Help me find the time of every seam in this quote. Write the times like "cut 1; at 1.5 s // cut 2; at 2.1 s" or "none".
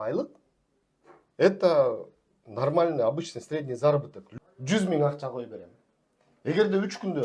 cut 1; at 4.2 s